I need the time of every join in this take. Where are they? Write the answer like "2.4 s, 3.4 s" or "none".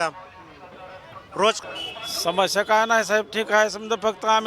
1.6 s